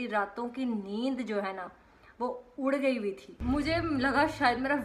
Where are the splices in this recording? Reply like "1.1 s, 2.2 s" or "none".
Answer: 3.3 s